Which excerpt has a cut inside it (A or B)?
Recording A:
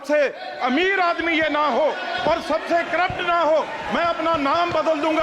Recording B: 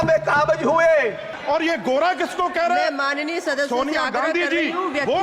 B